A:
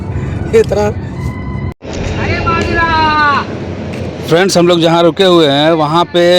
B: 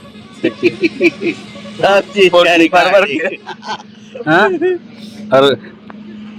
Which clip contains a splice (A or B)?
A